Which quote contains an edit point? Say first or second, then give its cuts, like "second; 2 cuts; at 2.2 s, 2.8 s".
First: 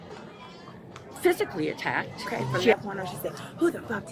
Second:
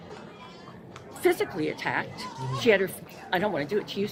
first; 1 cut; at 2.7 s